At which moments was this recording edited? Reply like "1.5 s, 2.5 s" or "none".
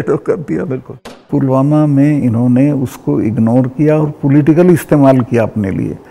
1.2 s